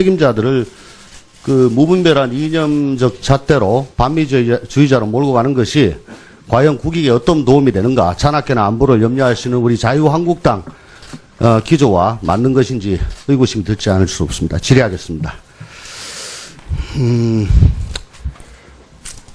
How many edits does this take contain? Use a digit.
1